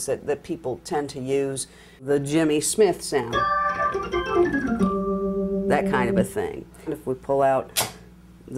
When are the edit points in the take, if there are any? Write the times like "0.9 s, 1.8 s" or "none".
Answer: 2.0 s, 7.0 s